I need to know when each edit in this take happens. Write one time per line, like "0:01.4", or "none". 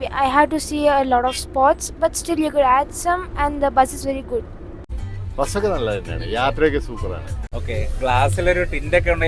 none